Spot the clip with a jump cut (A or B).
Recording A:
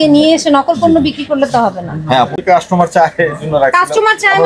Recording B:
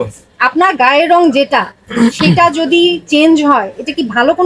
A